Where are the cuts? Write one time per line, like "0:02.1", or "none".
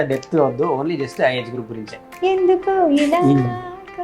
0:02.0